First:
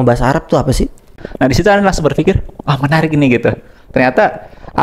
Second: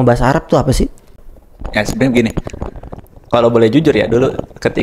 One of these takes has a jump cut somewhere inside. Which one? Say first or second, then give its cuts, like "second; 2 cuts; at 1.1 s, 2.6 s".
first; 1 cut; at 1.2 s